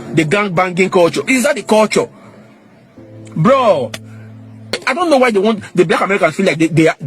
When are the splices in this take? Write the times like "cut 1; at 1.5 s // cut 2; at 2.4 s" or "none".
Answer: cut 1; at 4.8 s